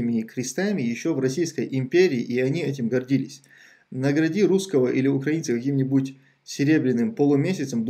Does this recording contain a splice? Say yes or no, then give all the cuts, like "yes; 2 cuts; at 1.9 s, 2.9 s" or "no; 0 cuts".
no; 0 cuts